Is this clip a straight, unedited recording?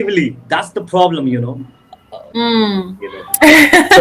yes; 0 cuts

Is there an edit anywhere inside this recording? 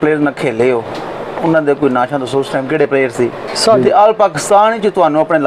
yes; 1 cut; at 3.5 s

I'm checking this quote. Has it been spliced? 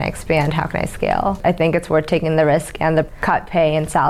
yes; 2 cuts; at 1.4 s, 3.2 s

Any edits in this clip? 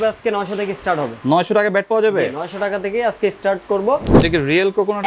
yes; 1 cut; at 4.1 s

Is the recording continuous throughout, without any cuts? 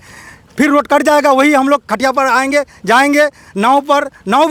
yes; 0 cuts

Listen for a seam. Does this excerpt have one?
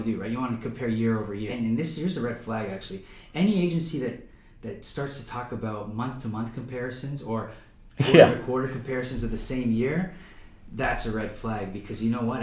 yes; 1 cut; at 1.5 s

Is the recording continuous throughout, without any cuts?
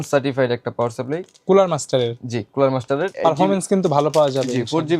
no; 1 cut; at 3.1 s

